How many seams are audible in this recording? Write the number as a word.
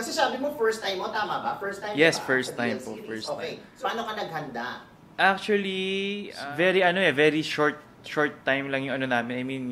two